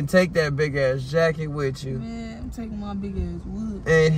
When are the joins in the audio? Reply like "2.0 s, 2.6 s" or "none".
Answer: none

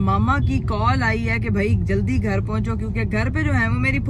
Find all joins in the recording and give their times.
none

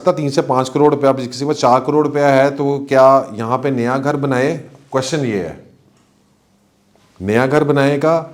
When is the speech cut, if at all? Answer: none

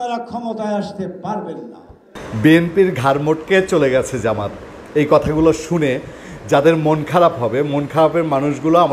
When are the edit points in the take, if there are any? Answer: 2.2 s

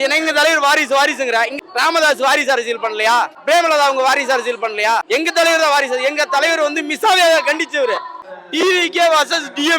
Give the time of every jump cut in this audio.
1.5 s, 3.4 s, 5.0 s, 8.3 s

